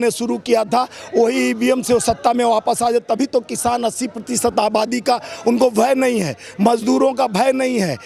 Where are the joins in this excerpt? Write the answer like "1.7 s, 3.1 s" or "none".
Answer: none

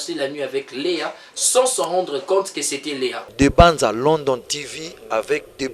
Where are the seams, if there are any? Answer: 3.2 s

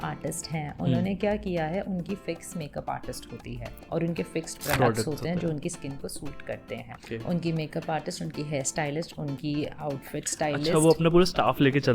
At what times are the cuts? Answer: 3.8 s, 6.9 s

